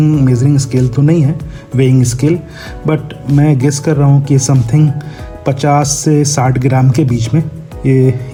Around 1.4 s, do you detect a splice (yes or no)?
no